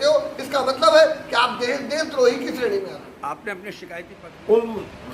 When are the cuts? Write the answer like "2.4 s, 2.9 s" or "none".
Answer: 3.7 s